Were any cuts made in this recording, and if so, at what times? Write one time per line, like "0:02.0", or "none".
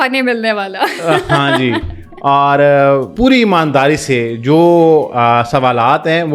0:03.1